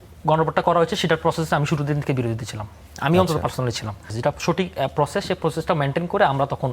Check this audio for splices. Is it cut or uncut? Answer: cut